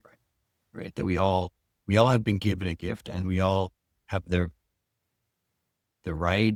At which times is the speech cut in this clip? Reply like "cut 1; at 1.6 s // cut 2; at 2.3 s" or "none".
none

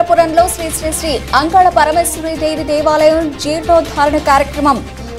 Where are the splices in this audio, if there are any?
none

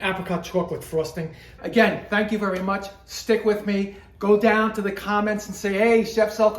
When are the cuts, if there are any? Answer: cut 1; at 1.6 s

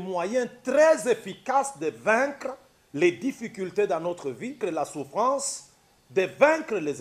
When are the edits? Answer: cut 1; at 4.6 s

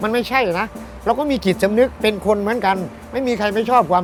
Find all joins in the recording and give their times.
none

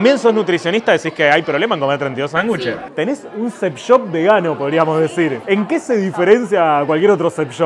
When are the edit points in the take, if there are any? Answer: cut 1; at 2.8 s // cut 2; at 5.4 s

